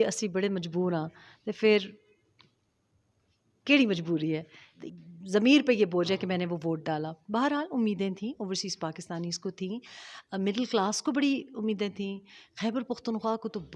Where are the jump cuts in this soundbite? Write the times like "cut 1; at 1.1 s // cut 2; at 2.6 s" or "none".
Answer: cut 1; at 4.8 s